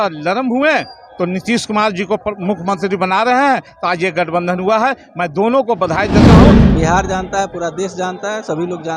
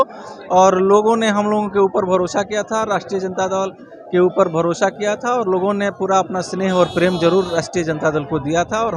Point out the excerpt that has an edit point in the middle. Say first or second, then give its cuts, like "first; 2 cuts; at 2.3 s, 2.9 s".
first; 2 cuts; at 6.1 s, 6.8 s